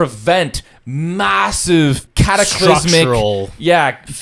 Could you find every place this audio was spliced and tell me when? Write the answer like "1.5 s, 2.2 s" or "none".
2.1 s